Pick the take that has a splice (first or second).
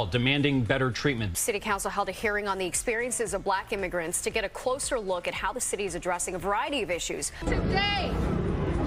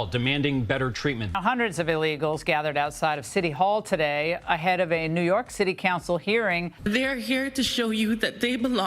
second